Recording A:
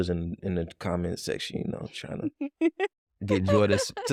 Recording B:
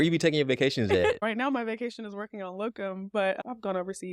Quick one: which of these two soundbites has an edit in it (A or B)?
B